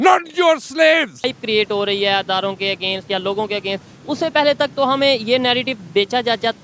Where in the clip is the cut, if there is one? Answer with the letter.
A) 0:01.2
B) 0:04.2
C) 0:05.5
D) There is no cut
A